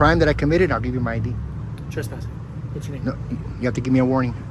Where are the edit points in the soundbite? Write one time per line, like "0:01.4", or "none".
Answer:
0:02.7